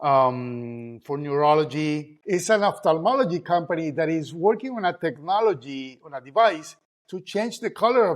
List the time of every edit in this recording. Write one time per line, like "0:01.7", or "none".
0:02.1